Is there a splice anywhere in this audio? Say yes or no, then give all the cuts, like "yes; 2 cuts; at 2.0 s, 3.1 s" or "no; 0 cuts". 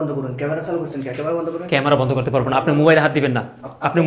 no; 0 cuts